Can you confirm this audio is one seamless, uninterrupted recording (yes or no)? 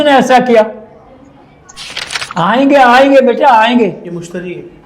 no